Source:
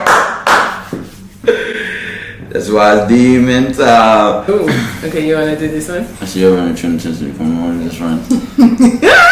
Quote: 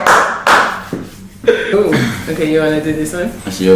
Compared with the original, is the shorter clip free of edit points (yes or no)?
no